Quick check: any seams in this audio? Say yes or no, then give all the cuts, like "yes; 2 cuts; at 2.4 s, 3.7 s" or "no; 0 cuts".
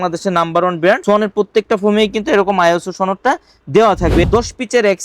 yes; 2 cuts; at 1.0 s, 4.3 s